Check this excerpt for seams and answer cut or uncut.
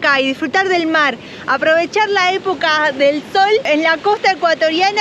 cut